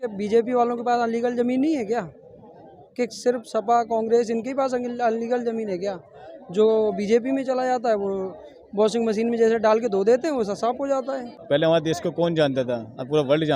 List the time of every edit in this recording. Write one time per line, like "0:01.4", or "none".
0:11.2

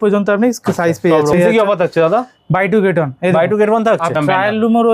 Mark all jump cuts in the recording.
0:01.3
0:04.1

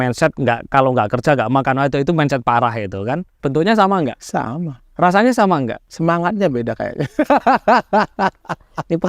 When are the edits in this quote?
0:03.4
0:04.2
0:05.8

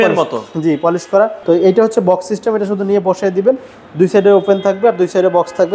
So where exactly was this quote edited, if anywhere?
0:01.4

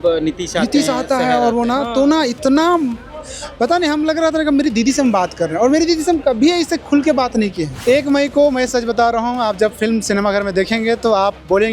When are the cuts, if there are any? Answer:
0:07.7

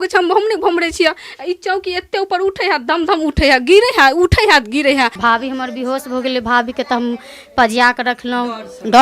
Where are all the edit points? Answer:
0:05.2

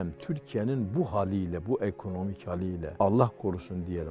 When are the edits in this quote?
0:02.9

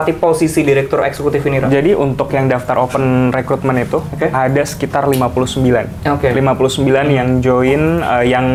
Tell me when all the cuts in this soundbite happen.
none

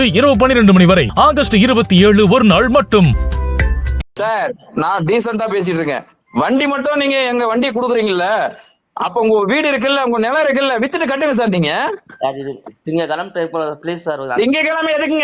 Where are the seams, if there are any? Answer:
0:04.1

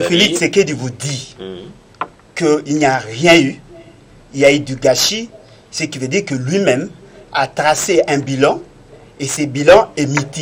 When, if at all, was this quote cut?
none

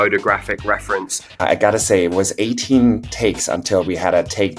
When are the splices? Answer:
0:01.4

